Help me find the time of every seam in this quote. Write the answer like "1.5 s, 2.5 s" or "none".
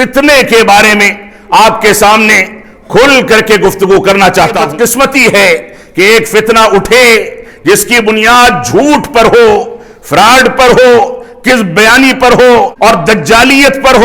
4.6 s, 12.7 s